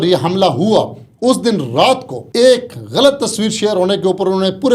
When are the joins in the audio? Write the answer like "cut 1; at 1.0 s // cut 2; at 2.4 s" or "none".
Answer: cut 1; at 2.2 s